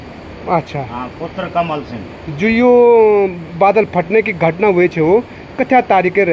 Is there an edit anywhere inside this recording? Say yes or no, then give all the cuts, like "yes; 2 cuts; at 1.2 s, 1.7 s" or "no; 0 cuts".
no; 0 cuts